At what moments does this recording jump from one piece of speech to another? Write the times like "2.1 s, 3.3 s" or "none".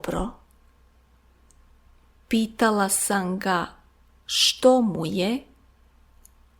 1.1 s